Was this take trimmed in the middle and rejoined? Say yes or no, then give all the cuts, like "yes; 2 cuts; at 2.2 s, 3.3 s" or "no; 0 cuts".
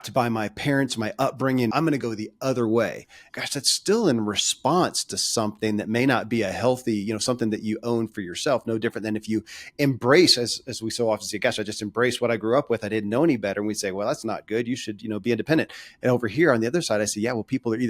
yes; 2 cuts; at 1.7 s, 3.2 s